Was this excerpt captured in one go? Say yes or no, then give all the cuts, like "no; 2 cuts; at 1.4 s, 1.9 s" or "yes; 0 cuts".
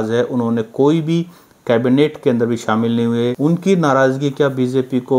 no; 1 cut; at 3.3 s